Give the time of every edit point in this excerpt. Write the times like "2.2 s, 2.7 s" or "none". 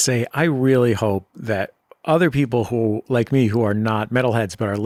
none